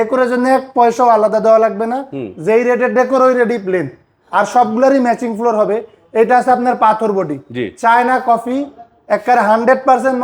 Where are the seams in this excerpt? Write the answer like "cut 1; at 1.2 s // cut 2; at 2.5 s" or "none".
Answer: none